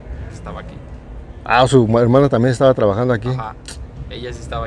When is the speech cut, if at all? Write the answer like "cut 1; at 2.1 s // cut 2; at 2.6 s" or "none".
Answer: none